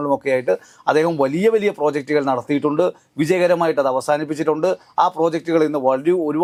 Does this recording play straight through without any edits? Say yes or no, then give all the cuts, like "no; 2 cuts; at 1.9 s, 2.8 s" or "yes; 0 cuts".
yes; 0 cuts